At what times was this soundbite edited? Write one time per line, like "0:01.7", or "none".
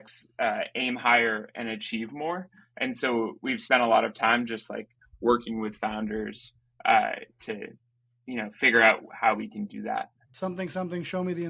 0:10.2